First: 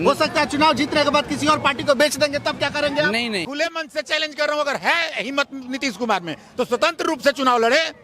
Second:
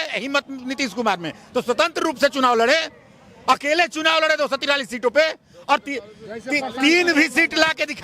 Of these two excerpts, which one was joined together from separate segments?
first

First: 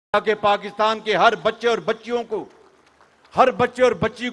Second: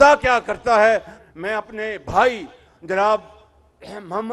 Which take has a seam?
second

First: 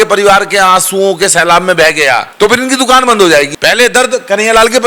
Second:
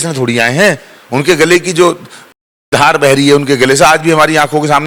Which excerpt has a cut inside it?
first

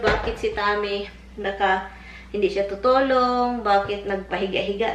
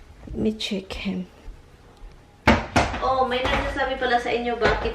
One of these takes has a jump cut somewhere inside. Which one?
second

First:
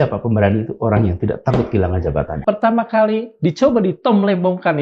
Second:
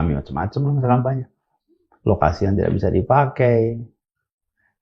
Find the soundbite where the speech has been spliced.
first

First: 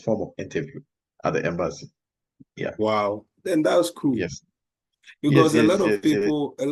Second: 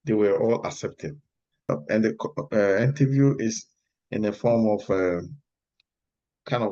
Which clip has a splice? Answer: second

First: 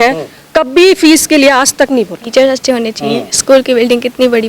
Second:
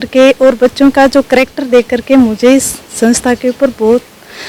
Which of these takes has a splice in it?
first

